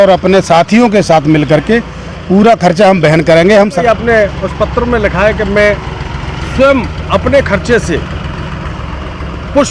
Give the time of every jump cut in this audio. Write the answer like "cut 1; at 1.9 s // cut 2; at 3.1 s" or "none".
cut 1; at 3.8 s